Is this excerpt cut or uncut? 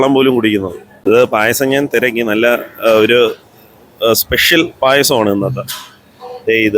cut